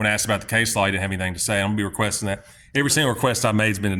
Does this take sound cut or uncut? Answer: uncut